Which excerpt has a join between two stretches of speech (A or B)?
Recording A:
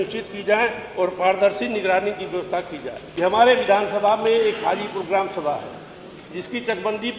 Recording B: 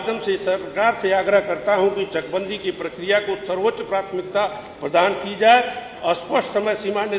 A